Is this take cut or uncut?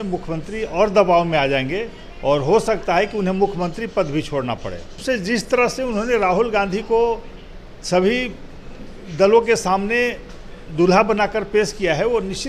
cut